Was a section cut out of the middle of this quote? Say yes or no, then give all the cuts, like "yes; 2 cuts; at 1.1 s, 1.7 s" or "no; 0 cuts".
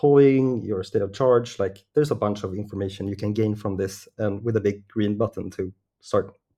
no; 0 cuts